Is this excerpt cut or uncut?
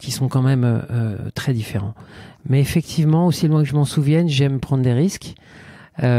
uncut